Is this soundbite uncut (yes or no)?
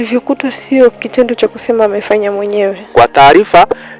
no